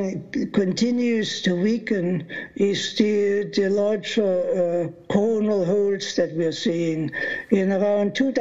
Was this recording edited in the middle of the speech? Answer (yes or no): no